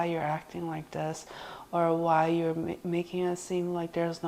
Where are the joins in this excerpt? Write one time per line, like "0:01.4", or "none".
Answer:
none